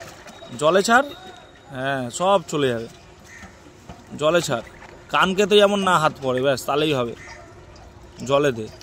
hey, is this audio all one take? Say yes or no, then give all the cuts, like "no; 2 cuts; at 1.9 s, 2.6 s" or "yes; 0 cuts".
yes; 0 cuts